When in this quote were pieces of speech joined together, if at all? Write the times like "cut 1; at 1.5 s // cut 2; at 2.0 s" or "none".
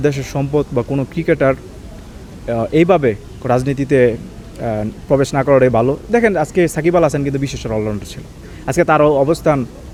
none